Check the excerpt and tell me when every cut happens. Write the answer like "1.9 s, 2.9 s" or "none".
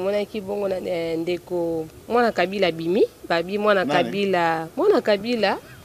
none